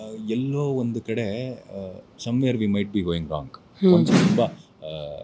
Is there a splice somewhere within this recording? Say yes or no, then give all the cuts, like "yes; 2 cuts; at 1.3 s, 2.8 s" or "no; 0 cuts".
yes; 1 cut; at 4.1 s